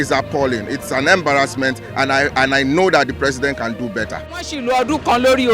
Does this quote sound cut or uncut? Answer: cut